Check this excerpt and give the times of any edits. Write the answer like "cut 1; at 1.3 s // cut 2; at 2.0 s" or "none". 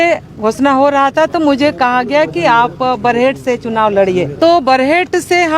cut 1; at 4.3 s